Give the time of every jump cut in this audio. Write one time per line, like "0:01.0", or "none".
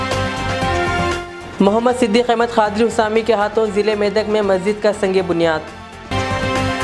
0:01.1